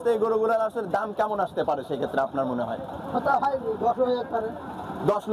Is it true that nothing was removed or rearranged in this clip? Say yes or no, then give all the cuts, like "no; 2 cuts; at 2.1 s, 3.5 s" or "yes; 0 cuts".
yes; 0 cuts